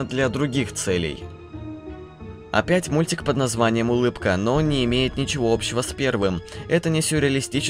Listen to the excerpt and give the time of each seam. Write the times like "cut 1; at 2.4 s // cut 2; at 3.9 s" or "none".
cut 1; at 2.1 s